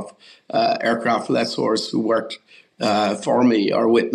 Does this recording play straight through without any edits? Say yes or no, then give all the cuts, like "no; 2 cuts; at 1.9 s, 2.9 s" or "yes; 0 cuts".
yes; 0 cuts